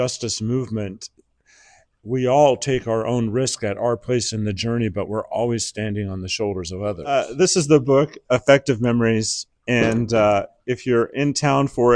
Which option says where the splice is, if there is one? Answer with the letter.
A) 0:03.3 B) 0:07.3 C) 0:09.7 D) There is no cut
B